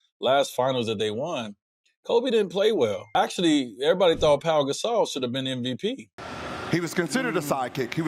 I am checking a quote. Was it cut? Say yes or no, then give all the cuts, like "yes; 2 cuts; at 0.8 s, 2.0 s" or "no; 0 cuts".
yes; 2 cuts; at 3.0 s, 6.1 s